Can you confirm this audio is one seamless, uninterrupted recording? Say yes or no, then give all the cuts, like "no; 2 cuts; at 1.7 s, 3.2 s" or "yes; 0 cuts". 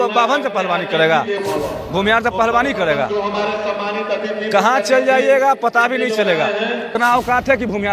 no; 2 cuts; at 1.4 s, 6.9 s